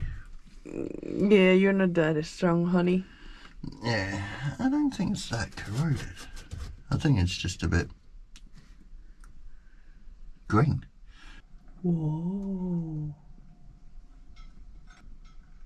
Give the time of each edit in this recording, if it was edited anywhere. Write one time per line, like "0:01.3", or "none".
none